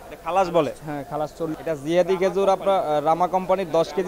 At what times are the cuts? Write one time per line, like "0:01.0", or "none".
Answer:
0:01.6

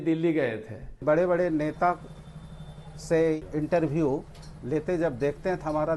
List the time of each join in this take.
0:01.0

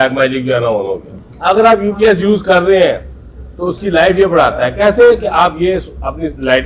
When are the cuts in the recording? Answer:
0:01.1

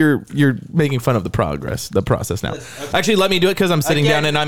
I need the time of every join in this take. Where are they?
0:02.7

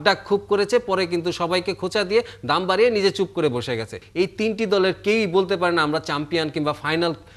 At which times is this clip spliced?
0:04.0

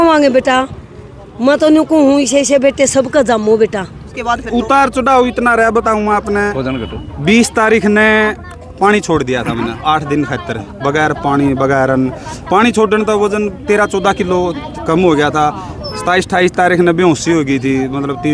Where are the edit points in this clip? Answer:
0:04.2

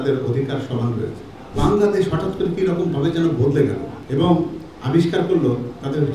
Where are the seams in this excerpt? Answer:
0:01.6

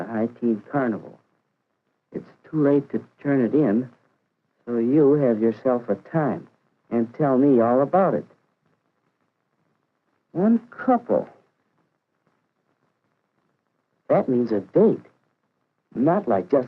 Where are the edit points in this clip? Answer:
0:05.3

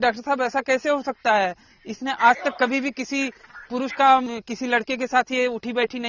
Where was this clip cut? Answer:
0:04.3

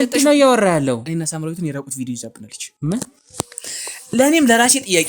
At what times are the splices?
0:01.1

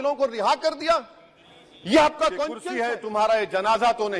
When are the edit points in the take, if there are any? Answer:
0:02.6

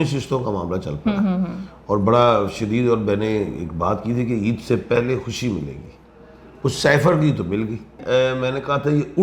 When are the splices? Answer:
none

